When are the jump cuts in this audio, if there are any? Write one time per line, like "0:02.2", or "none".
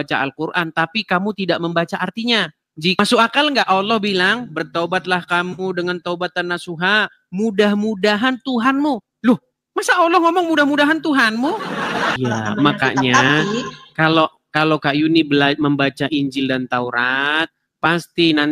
0:03.0
0:12.1

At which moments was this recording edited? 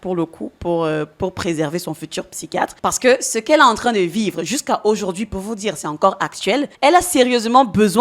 0:06.7

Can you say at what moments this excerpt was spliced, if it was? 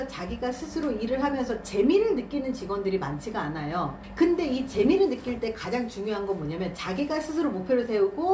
none

